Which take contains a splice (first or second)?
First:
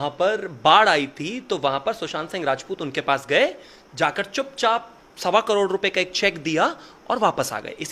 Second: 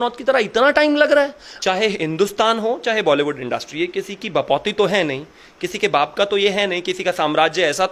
second